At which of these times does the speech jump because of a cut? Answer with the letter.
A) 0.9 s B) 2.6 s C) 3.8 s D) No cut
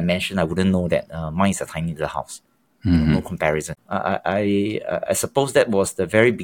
C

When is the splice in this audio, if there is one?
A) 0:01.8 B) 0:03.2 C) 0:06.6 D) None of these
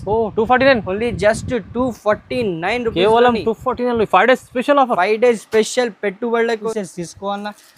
C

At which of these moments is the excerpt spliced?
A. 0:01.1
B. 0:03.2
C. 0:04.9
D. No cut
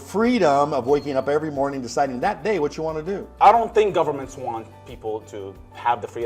B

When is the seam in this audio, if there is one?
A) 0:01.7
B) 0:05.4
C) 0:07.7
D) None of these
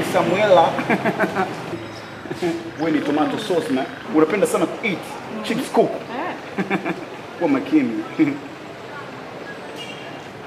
A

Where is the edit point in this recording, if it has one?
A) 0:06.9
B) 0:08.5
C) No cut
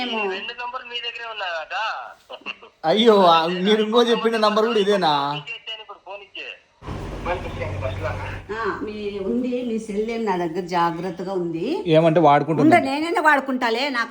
A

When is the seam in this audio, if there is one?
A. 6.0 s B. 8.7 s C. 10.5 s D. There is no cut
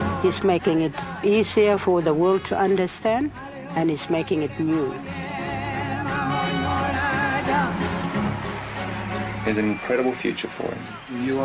D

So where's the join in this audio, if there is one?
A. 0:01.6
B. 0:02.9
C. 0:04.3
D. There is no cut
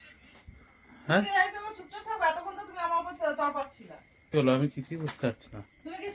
C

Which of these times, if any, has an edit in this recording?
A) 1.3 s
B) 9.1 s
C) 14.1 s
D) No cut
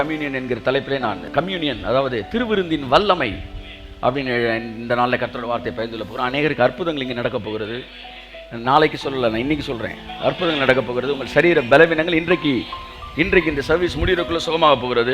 A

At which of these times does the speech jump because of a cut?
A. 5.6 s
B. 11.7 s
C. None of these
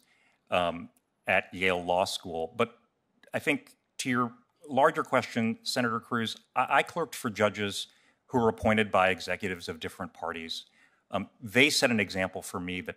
C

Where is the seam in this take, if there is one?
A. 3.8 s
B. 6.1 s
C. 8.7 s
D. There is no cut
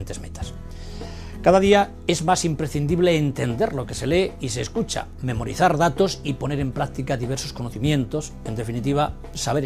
C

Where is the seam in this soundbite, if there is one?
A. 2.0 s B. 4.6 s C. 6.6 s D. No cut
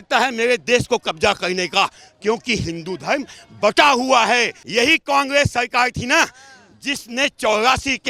B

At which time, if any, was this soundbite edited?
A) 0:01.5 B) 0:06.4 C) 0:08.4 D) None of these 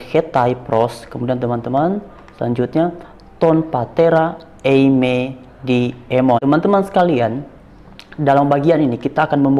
B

